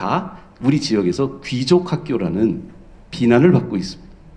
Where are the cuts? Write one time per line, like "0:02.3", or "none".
none